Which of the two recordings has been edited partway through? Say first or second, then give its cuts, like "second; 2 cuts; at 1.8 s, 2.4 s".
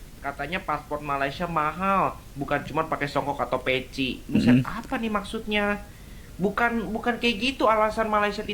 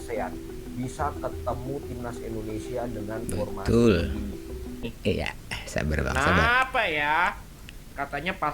second; 1 cut; at 4.9 s